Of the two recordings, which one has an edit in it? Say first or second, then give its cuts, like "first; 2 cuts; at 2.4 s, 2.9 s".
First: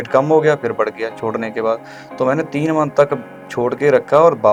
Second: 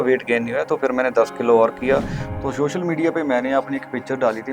second; 1 cut; at 2.2 s